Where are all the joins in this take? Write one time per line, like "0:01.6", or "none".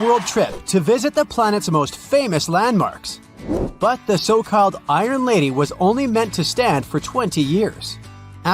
0:03.6